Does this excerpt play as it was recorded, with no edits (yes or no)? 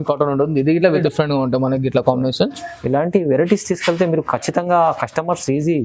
no